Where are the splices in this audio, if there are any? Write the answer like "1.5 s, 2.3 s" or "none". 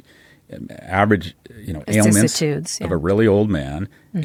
none